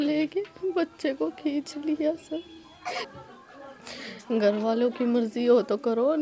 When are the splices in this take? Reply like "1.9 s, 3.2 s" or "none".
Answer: 3.0 s